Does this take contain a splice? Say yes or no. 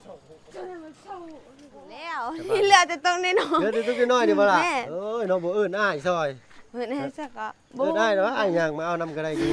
yes